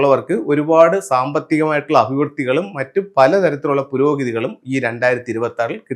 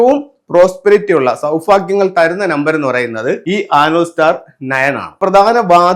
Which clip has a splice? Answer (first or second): second